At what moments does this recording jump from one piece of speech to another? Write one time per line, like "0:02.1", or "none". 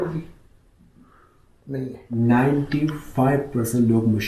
0:02.0